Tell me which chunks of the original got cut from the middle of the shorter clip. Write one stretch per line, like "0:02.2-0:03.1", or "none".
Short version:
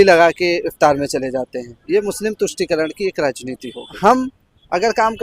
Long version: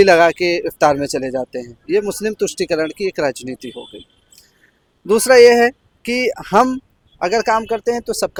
0:03.9-0:06.4